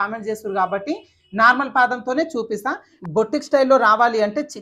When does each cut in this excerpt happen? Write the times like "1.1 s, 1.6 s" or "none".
2.9 s